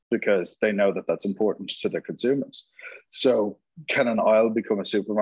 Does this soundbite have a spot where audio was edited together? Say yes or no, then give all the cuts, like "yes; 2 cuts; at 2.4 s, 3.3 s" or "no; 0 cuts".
no; 0 cuts